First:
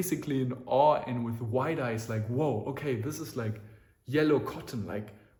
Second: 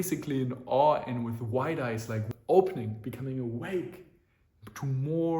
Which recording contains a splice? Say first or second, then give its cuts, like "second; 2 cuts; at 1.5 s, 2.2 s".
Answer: second; 1 cut; at 2.3 s